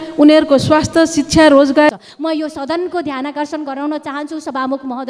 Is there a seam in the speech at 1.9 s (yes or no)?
yes